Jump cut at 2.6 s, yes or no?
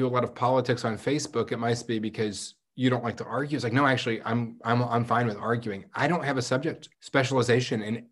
no